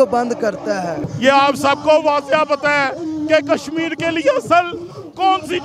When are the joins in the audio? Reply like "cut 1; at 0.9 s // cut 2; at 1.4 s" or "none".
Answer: cut 1; at 1.1 s